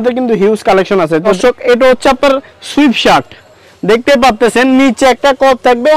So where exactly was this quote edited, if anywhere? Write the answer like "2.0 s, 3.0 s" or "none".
1.2 s